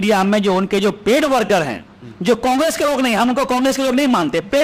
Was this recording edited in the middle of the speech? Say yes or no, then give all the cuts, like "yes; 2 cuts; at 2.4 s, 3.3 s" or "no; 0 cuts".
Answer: no; 0 cuts